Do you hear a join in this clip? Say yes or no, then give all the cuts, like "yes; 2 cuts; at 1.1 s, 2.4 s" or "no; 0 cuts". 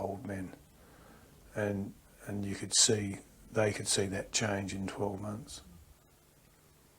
yes; 1 cut; at 5.9 s